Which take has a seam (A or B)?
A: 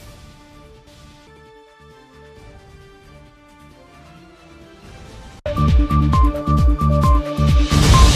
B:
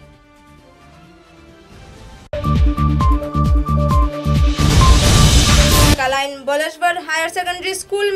B